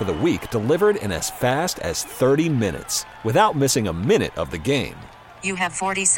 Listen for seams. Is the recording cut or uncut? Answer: uncut